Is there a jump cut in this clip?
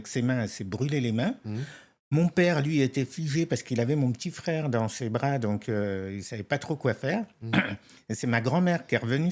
no; 0 cuts

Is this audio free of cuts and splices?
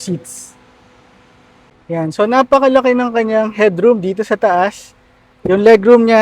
no; 1 cut; at 1.7 s

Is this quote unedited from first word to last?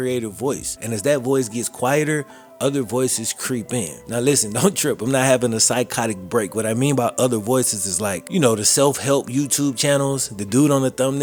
yes; 0 cuts

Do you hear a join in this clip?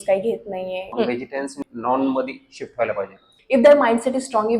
yes; 2 cuts; at 1.3 s, 3.3 s

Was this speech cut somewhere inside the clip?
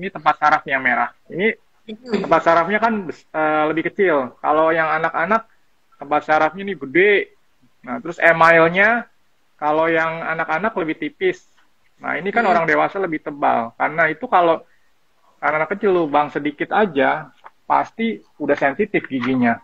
no; 0 cuts

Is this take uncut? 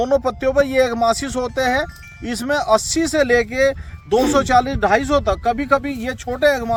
yes; 0 cuts

